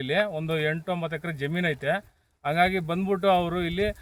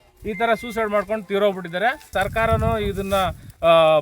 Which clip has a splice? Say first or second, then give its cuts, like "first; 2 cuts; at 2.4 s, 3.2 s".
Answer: second; 1 cut; at 2.1 s